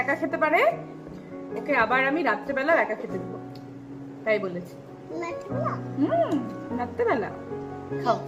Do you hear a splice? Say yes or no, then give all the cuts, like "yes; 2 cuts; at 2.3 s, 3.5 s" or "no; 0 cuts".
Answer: no; 0 cuts